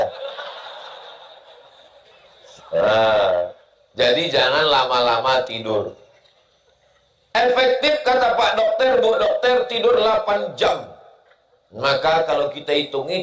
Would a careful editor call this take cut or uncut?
uncut